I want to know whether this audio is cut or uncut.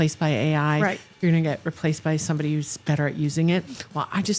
uncut